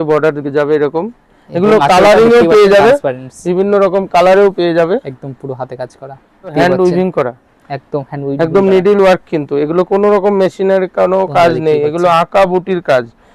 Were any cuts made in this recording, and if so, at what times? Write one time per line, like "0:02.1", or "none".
0:06.5